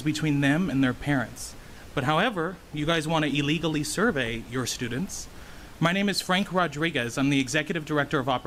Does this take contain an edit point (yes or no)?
no